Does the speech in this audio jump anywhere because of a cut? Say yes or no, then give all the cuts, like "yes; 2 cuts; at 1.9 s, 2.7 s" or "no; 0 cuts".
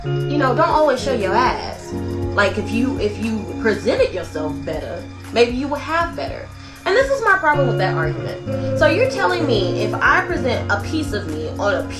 no; 0 cuts